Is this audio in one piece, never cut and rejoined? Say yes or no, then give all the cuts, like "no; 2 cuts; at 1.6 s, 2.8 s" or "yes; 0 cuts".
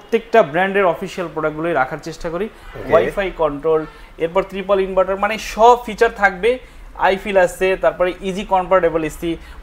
no; 1 cut; at 2.6 s